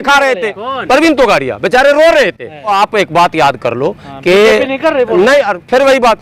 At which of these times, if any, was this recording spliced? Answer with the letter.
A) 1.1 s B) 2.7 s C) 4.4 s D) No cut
B